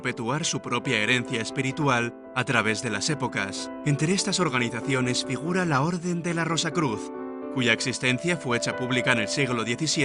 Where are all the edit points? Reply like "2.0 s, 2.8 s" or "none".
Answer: none